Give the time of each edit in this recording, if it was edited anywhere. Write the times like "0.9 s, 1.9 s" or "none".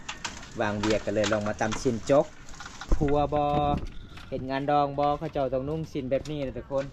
2.9 s